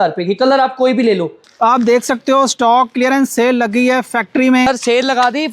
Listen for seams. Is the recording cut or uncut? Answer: cut